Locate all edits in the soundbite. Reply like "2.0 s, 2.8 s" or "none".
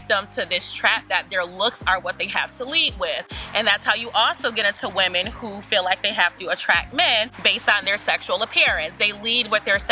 none